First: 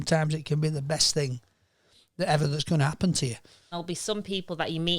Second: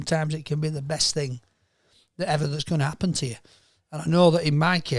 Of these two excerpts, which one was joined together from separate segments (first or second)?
first